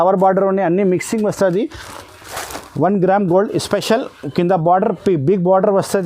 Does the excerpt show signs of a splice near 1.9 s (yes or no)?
yes